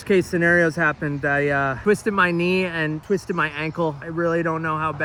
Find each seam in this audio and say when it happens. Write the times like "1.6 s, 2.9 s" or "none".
none